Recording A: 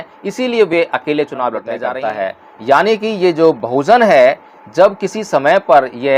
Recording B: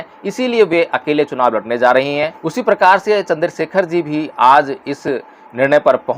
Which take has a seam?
A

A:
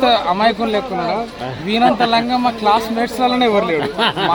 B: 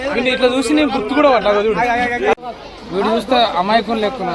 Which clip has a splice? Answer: B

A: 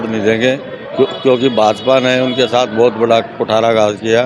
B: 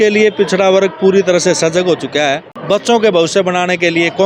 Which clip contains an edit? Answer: B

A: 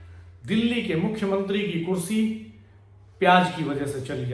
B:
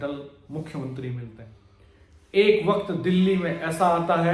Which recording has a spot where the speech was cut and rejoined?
B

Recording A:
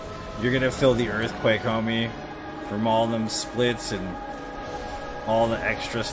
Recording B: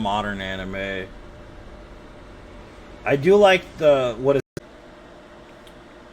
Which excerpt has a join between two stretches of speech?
B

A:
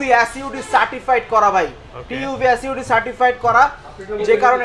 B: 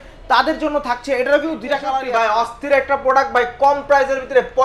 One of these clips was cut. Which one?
B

